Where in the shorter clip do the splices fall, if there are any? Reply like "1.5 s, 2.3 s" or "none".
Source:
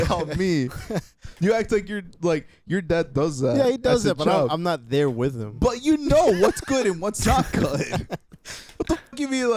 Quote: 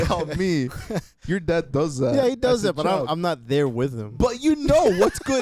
1.1 s